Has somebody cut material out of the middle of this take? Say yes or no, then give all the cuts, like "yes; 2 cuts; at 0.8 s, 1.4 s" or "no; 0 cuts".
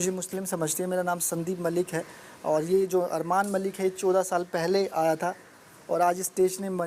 no; 0 cuts